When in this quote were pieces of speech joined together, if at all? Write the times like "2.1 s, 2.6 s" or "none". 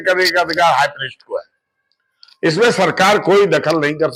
none